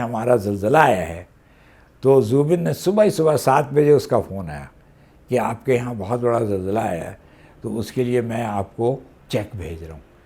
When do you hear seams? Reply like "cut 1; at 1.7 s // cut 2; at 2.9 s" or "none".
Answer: cut 1; at 9.1 s